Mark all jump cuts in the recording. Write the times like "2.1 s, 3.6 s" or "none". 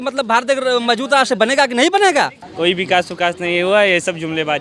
2.4 s